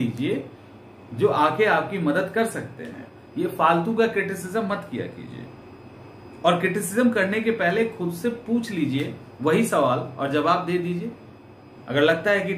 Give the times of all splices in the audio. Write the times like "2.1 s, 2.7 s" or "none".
none